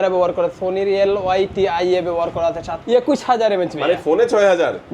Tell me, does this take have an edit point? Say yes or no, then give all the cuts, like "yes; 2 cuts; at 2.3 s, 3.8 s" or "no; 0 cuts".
yes; 1 cut; at 2.7 s